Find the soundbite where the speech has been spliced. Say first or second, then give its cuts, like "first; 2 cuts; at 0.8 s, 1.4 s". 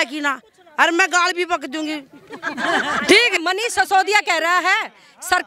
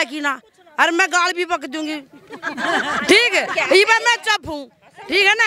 first; 1 cut; at 3.4 s